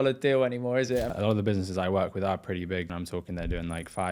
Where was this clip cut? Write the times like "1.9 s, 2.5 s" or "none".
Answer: 1.1 s, 2.9 s